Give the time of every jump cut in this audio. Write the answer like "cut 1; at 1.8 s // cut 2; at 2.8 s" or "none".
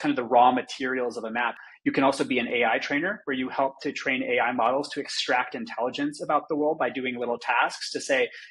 cut 1; at 1.6 s